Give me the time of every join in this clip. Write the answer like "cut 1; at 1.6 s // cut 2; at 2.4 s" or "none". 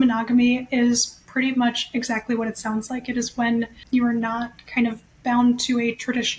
cut 1; at 3.8 s